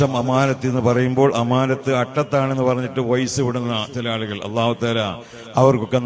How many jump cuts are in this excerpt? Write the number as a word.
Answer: zero